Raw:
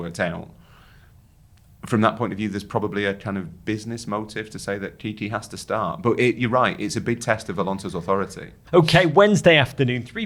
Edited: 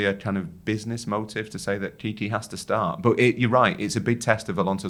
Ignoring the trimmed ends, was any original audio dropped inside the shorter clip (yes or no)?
no